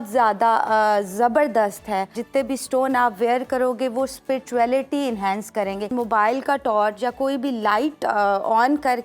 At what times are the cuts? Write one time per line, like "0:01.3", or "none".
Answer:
0:02.2
0:05.9